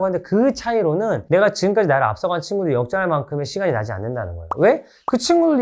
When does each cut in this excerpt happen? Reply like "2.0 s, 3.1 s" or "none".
none